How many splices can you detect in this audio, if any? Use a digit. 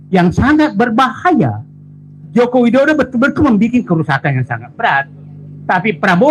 1